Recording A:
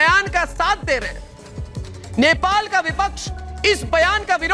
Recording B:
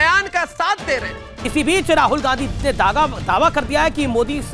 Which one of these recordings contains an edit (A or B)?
B